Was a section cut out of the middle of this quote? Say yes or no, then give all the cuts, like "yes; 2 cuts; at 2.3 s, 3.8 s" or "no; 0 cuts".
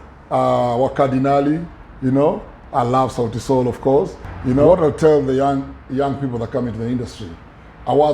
yes; 1 cut; at 4.7 s